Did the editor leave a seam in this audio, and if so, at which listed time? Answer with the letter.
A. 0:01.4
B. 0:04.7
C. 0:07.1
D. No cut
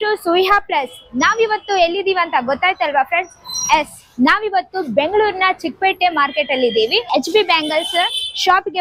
C